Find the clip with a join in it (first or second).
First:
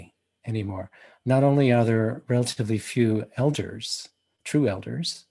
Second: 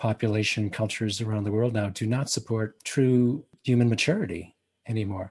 second